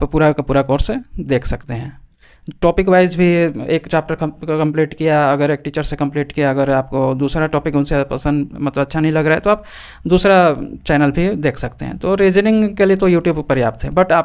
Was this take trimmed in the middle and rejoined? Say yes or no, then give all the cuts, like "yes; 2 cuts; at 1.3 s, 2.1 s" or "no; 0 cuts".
no; 0 cuts